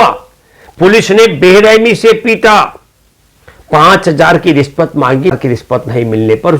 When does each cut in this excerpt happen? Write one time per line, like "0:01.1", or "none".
0:05.4

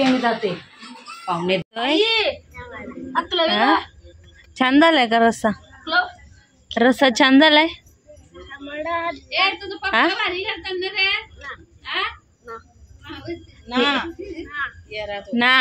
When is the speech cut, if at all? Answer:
0:01.6

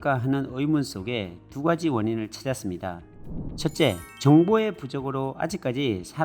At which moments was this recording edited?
none

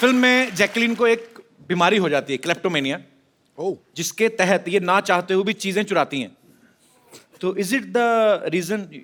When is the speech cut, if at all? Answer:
none

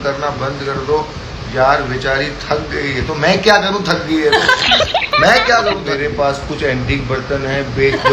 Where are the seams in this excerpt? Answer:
0:05.8

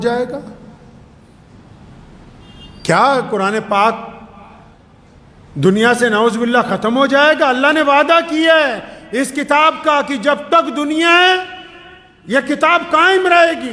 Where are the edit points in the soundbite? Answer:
none

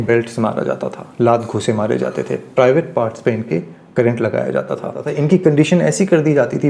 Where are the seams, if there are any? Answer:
0:05.1

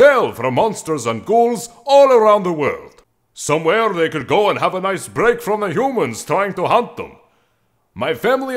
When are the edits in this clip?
none

